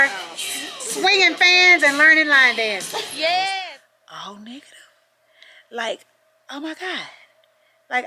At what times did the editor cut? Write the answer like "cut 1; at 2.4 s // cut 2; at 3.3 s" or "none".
cut 1; at 3.6 s